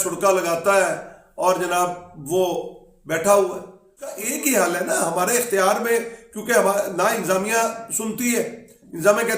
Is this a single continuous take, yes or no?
no